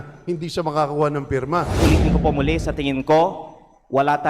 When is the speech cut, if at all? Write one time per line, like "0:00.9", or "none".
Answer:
0:01.8